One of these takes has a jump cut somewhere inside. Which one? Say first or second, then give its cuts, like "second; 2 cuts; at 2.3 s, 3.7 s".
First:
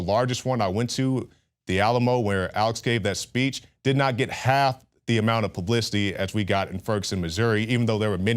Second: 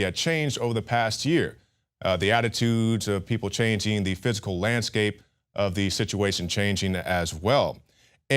second; 1 cut; at 7.2 s